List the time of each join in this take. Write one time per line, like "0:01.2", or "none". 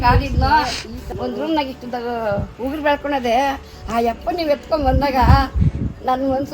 0:01.1